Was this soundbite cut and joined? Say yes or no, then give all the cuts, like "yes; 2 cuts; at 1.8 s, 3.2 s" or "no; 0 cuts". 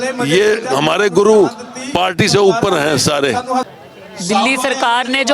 yes; 1 cut; at 3.7 s